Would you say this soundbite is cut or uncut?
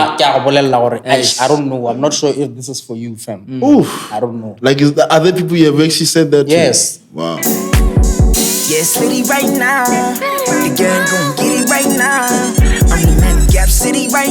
cut